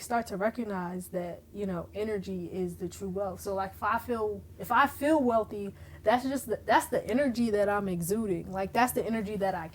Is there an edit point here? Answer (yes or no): no